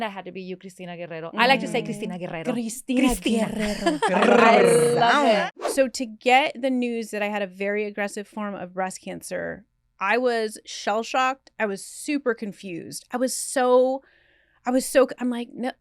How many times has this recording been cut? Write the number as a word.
one